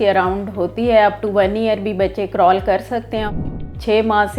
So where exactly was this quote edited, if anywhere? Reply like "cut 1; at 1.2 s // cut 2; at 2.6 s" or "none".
cut 1; at 3.3 s